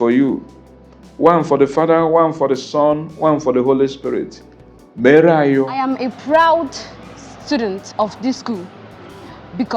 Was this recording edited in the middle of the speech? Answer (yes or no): yes